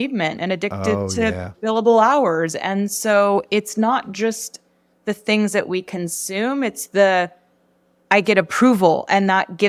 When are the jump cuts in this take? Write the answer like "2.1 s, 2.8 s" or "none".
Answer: none